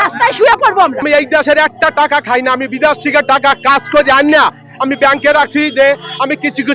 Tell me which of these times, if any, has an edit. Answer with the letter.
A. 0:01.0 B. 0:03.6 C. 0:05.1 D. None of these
A